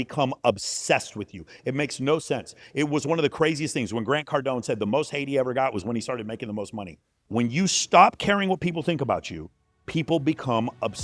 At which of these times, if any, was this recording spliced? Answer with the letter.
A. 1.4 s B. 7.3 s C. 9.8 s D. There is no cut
B